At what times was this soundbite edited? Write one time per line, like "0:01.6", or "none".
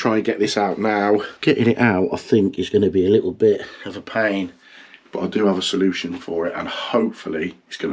none